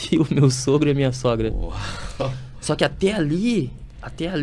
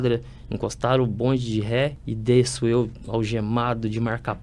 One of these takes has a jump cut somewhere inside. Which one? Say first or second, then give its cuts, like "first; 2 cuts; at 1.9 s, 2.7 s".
second; 1 cut; at 2.1 s